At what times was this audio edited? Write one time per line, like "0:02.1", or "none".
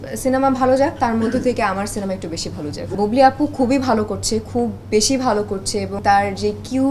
0:02.9
0:06.0